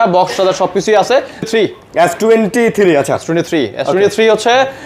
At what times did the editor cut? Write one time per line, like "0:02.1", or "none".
0:01.5